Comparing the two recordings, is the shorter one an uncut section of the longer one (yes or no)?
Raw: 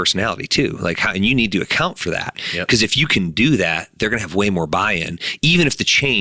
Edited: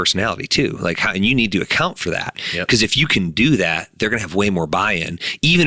yes